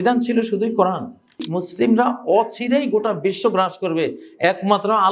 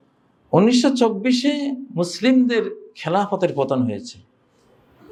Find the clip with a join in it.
first; 1 cut; at 1.6 s

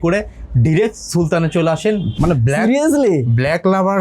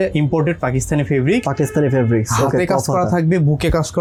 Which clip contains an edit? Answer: first; 1 cut; at 2.3 s

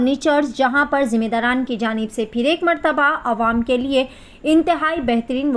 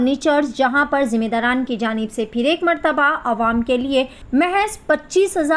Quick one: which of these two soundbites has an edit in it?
second; 1 cut; at 4.2 s

